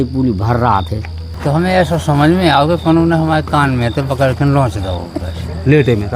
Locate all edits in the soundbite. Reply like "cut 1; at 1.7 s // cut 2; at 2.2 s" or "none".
cut 1; at 1.3 s